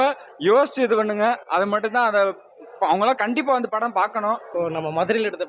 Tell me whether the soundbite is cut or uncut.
cut